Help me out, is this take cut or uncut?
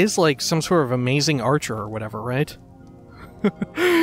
uncut